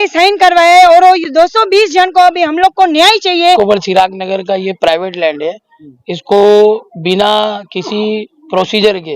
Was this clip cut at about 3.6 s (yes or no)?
yes